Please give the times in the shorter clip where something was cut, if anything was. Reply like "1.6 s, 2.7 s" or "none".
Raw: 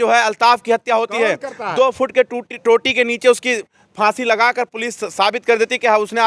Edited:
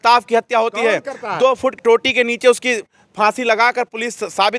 1.7 s